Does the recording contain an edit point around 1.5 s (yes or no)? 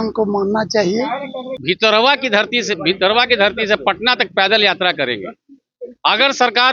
yes